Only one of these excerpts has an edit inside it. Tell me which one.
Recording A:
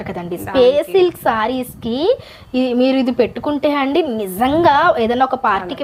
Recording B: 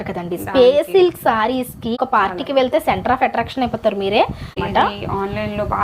B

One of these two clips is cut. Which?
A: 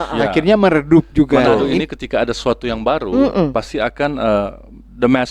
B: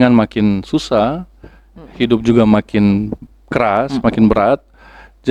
A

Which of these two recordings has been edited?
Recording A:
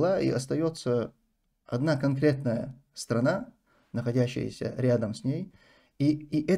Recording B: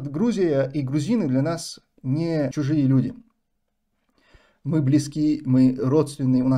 B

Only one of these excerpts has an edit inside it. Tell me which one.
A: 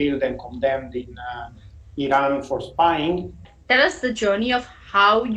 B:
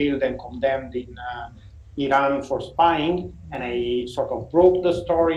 A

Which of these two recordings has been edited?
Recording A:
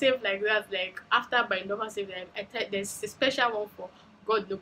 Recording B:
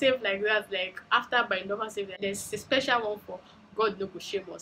B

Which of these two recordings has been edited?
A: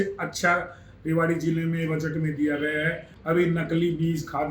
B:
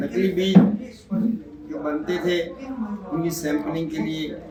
A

